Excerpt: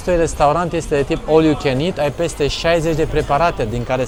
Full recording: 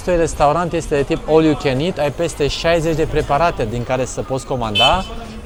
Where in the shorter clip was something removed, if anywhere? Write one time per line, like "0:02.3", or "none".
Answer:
none